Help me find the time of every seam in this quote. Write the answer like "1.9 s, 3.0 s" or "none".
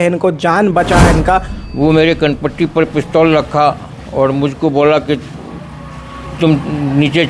1.6 s